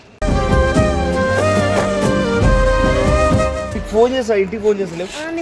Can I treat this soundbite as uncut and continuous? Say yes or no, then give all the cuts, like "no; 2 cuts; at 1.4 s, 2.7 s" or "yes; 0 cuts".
no; 1 cut; at 3.8 s